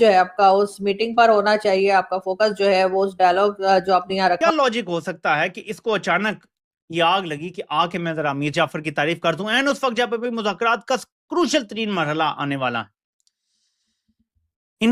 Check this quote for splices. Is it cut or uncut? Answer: cut